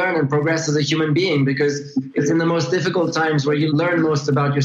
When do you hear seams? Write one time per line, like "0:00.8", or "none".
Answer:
0:03.7